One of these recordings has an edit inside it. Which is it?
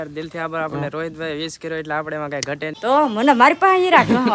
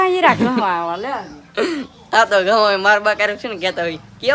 first; 1 cut; at 2.7 s

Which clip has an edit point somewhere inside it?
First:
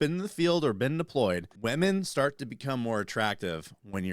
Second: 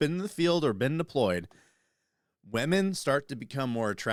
first; 1 cut; at 1.5 s

